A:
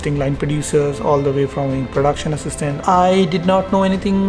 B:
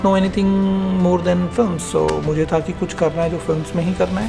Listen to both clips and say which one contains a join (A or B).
A